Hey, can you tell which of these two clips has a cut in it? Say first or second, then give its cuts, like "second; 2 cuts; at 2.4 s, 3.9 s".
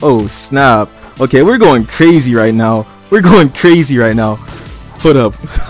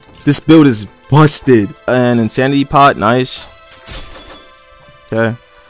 second; 1 cut; at 1.8 s